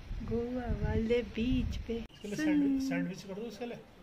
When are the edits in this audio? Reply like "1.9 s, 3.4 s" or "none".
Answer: 2.4 s